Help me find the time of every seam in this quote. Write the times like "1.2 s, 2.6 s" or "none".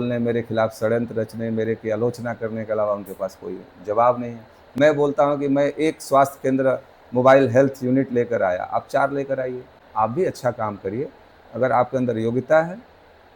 9.8 s